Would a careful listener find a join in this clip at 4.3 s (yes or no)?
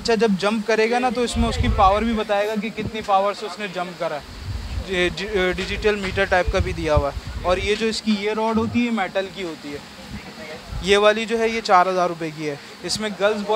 no